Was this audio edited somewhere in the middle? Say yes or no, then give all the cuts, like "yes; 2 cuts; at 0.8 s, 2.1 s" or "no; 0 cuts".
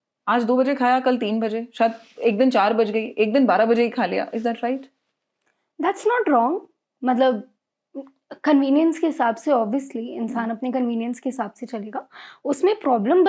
no; 0 cuts